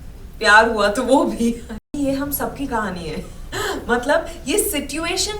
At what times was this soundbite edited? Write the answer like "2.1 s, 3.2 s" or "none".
1.9 s